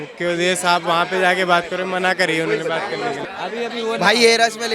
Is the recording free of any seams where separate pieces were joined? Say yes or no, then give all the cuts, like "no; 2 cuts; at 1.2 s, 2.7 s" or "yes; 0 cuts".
no; 1 cut; at 3.2 s